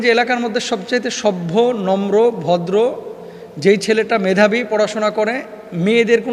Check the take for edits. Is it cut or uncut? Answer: uncut